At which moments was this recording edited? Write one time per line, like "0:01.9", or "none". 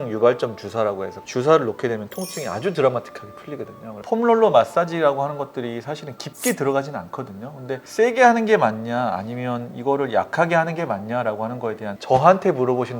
0:04.0
0:12.0

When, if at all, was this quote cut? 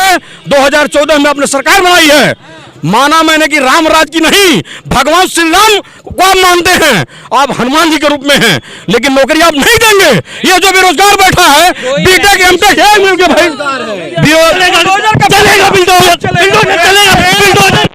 0:14.6

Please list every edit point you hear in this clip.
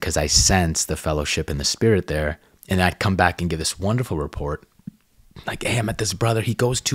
none

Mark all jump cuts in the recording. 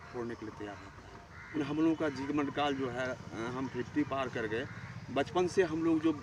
0:01.6

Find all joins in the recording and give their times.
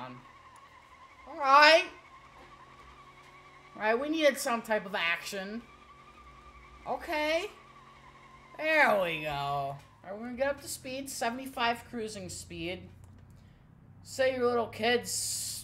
0:09.9

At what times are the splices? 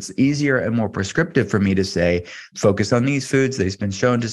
0:01.1
0:02.4

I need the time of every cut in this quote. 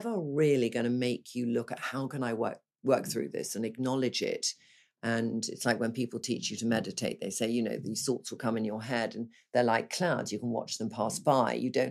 none

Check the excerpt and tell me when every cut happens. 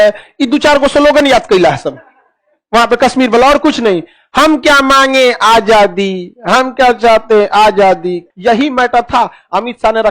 0:08.2

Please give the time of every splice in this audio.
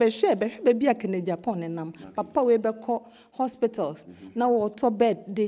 none

